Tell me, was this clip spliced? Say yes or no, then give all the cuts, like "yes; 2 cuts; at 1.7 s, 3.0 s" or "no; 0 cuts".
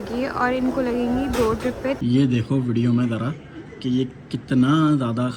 yes; 1 cut; at 2.0 s